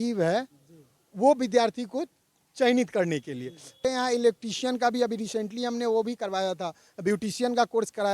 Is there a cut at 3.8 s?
yes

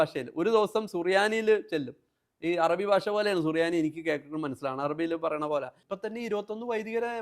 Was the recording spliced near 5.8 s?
yes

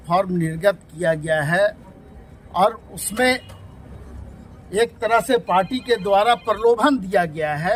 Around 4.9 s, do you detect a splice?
no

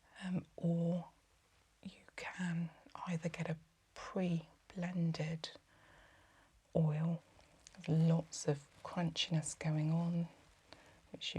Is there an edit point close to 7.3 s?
yes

